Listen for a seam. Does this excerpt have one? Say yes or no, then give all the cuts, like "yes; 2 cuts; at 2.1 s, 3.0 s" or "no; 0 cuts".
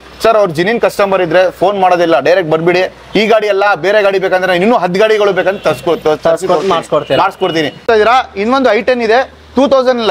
yes; 1 cut; at 7.8 s